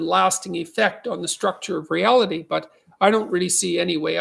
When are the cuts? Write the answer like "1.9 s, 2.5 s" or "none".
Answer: none